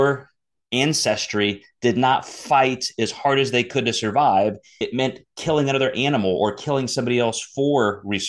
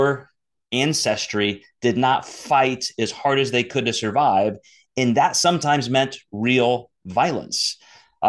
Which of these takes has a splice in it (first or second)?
first